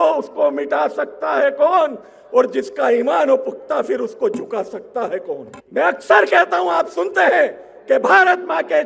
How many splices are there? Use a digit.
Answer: 1